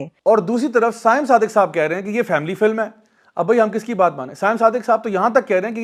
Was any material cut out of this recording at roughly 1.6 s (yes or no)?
no